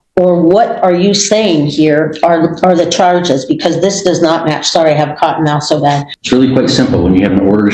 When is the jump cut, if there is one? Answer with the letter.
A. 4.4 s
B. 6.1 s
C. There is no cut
B